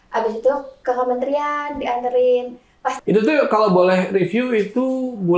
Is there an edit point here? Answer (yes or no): yes